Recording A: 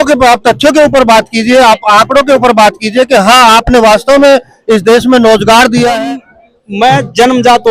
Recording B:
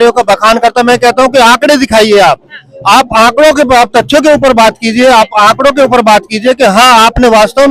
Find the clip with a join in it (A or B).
A